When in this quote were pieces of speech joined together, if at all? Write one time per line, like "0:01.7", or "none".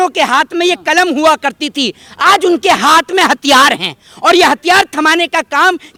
none

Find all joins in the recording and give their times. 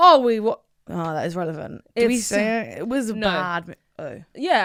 none

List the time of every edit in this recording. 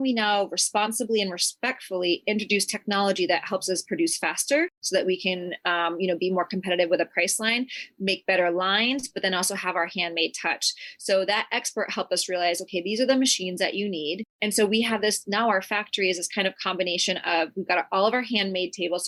none

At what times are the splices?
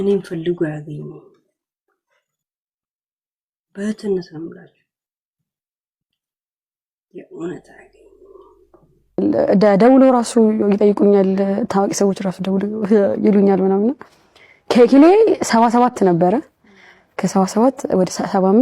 0:09.2

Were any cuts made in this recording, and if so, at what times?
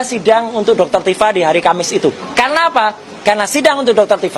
0:02.2

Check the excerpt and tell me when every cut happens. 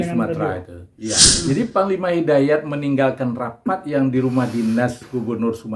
0:01.3

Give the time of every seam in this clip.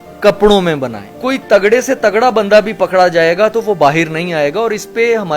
0:01.1

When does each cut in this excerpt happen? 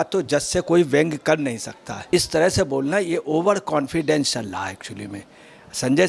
0:02.1

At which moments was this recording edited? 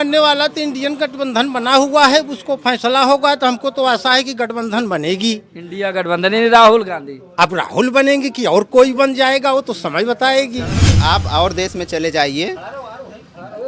0:10.9

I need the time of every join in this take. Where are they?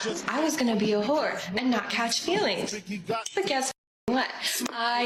none

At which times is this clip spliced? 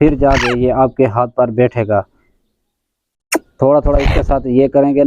0:02.2

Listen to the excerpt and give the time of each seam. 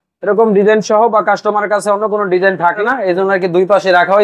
0:02.8

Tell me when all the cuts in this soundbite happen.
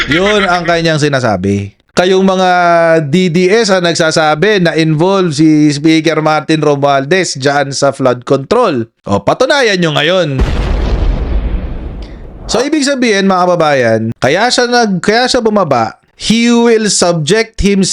none

